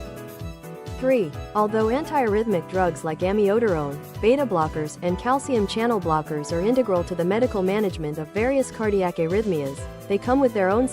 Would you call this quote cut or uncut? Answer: cut